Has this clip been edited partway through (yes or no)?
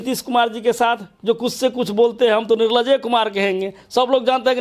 no